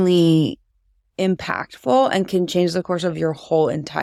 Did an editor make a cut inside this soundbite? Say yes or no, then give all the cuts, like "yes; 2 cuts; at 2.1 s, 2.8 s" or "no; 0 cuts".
no; 0 cuts